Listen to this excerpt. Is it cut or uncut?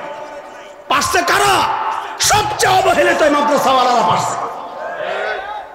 uncut